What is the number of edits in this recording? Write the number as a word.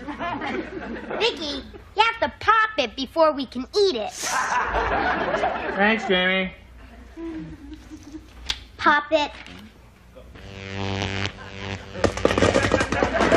one